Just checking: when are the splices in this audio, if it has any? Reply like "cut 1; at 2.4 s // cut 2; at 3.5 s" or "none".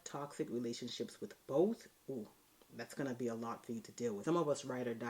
cut 1; at 4.2 s